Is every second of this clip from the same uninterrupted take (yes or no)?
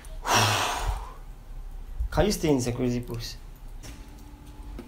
no